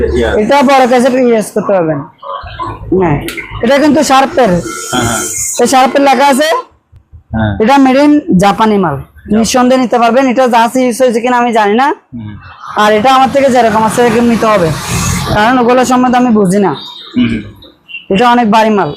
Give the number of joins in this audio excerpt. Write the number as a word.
zero